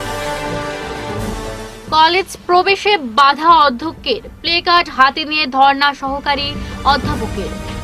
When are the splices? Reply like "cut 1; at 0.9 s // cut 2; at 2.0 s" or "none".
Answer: cut 1; at 1.2 s